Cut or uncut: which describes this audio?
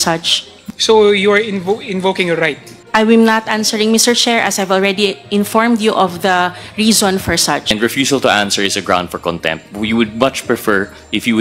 cut